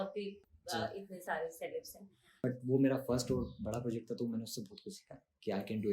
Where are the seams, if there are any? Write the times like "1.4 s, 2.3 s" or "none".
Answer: 2.4 s